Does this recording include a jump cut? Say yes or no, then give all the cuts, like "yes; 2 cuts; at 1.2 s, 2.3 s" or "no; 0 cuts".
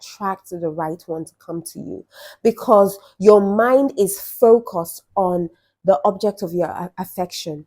no; 0 cuts